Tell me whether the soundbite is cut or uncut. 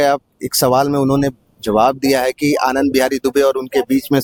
uncut